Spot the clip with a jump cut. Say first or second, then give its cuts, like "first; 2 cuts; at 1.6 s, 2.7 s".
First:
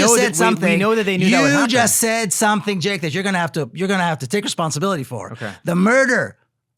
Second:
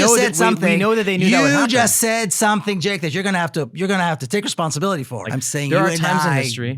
second; 1 cut; at 5.2 s